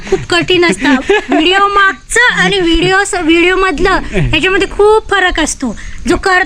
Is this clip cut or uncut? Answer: uncut